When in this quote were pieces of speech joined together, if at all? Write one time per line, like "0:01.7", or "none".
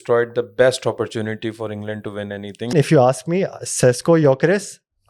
0:02.7